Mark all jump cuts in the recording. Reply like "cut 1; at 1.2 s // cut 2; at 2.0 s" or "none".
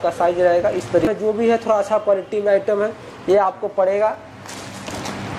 cut 1; at 1.0 s